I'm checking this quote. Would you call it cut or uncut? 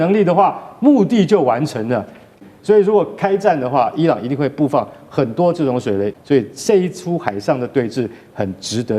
cut